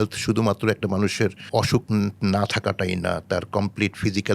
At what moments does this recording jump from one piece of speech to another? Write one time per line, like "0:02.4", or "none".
0:01.4